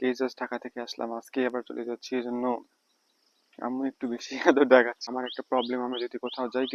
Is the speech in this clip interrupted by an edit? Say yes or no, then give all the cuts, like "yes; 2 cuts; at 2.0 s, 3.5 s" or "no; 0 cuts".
yes; 1 cut; at 5.1 s